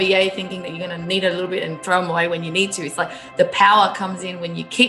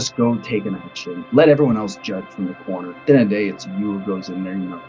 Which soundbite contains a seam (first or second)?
second